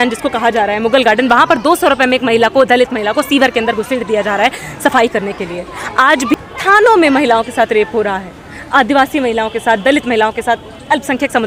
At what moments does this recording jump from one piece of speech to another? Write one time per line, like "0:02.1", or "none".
0:06.3